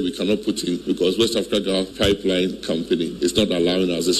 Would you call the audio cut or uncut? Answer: cut